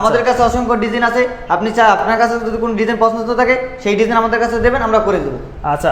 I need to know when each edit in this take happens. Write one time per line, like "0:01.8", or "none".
none

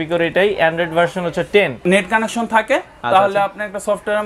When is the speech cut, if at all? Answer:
0:01.8

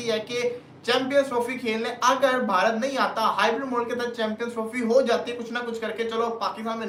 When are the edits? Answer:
none

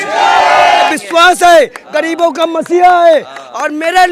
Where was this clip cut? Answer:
0:00.9

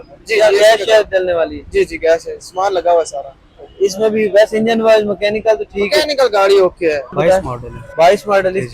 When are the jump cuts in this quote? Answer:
0:07.1

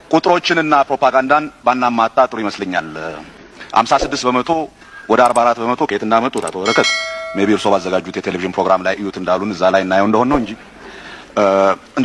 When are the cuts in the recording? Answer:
none

